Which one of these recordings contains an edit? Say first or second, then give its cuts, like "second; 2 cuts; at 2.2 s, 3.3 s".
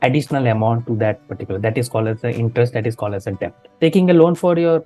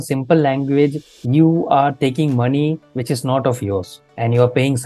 first; 1 cut; at 3.7 s